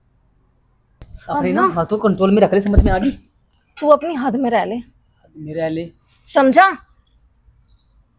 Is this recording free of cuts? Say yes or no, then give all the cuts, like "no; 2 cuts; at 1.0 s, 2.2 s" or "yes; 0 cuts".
no; 1 cut; at 1.1 s